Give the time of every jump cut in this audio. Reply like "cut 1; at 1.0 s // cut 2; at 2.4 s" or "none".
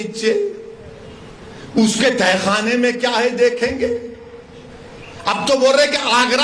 none